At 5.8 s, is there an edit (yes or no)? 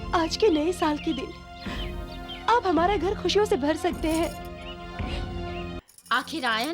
yes